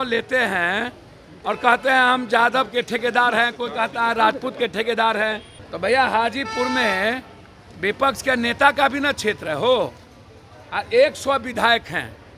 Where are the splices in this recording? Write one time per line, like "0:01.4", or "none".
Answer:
0:05.5

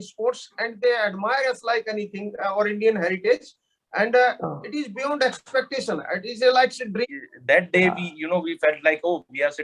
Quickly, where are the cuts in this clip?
0:07.1

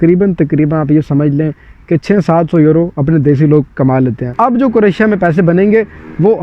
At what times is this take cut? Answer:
0:04.3

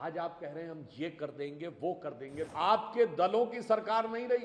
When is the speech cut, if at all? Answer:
0:02.4

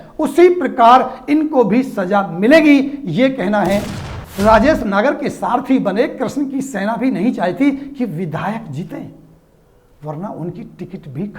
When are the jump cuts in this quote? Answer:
0:03.9

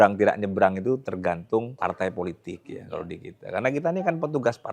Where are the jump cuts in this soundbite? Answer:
0:01.7

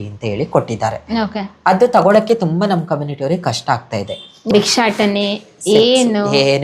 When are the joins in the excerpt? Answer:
0:04.5

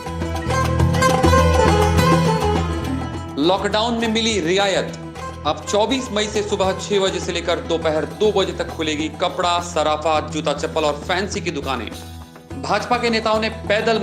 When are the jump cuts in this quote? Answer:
0:03.2

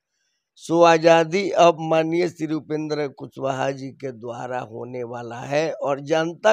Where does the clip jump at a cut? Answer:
none

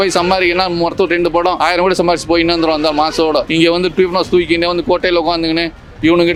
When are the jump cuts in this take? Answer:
none

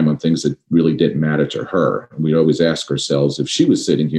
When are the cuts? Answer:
none

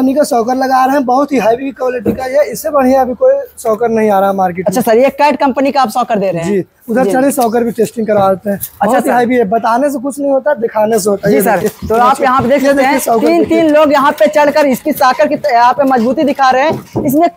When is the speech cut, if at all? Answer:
none

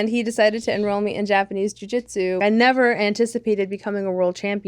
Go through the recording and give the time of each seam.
0:02.4

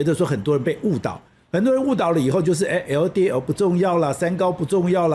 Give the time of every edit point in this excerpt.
none

